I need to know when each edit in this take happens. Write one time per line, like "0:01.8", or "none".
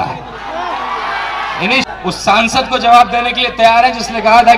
0:01.8